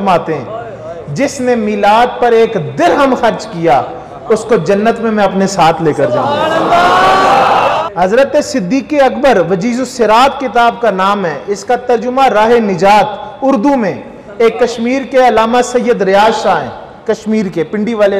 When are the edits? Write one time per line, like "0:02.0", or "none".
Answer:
0:07.8